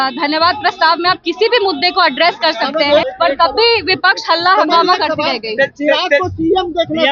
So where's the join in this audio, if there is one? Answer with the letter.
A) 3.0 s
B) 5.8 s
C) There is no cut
A